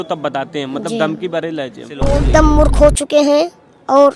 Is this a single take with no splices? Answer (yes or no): no